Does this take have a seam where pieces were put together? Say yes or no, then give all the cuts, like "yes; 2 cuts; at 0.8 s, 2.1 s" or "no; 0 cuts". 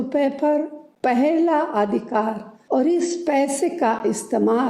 yes; 1 cut; at 2.5 s